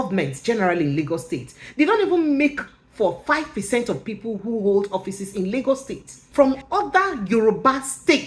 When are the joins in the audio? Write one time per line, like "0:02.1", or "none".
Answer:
0:06.2